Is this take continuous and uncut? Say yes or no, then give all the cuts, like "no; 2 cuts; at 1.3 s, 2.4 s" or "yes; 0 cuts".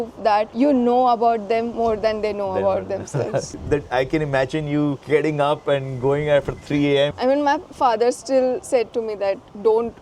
no; 2 cuts; at 3.5 s, 7.1 s